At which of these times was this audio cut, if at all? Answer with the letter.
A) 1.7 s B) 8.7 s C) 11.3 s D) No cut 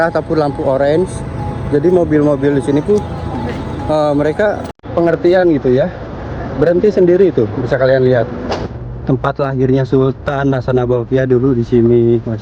B